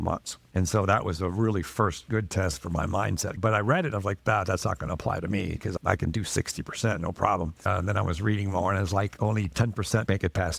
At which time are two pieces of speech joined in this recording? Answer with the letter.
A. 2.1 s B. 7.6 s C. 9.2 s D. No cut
D